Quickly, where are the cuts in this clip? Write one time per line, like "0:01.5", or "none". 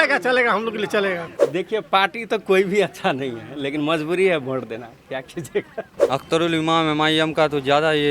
0:01.3
0:05.8